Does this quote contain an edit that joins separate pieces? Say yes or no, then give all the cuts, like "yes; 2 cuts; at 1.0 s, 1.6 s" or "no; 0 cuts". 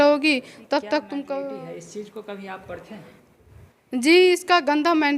yes; 1 cut; at 1.5 s